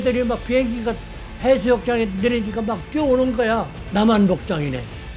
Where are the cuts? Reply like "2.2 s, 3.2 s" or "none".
3.8 s